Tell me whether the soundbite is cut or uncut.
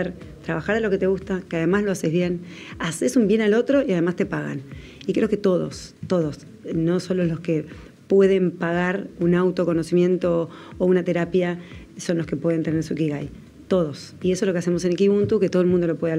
uncut